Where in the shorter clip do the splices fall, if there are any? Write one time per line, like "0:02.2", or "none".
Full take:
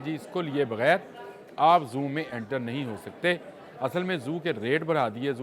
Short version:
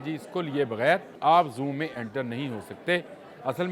0:01.1

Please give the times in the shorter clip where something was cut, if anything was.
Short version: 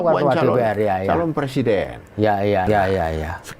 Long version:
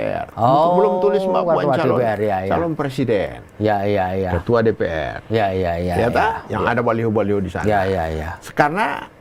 0:02.6

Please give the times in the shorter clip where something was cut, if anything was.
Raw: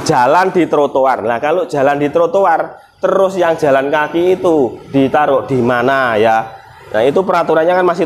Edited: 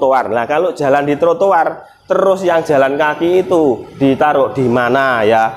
none

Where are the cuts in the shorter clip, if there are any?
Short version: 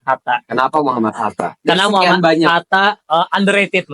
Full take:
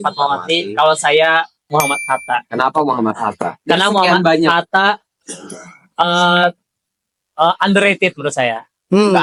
0:03.0

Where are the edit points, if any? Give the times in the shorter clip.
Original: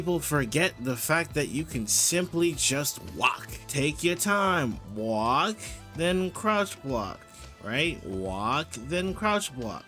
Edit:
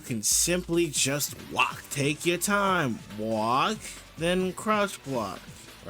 0:01.8

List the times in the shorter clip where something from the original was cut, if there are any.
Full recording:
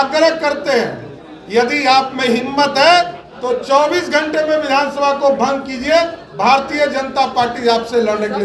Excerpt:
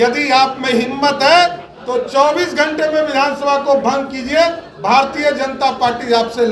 none

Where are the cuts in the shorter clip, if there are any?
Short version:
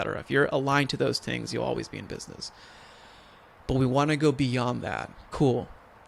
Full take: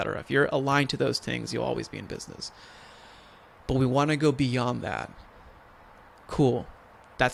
0:05.2

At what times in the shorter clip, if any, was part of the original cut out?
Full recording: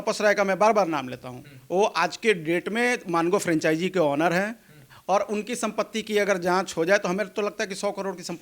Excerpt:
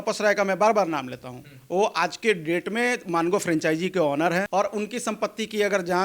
0:04.5

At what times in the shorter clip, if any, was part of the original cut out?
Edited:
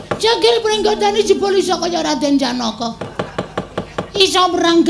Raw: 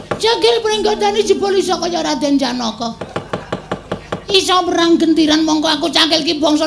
0:03.1

